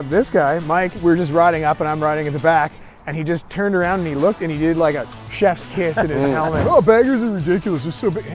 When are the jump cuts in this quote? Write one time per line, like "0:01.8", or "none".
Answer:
0:00.9
0:06.6